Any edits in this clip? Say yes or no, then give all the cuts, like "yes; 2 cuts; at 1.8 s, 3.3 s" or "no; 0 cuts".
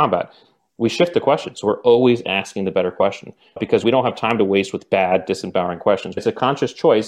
yes; 2 cuts; at 3.8 s, 6.2 s